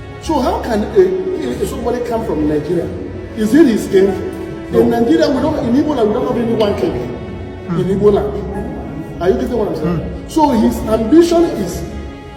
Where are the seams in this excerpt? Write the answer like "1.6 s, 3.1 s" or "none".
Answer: none